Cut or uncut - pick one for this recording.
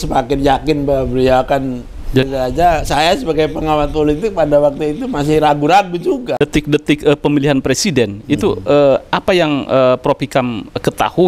cut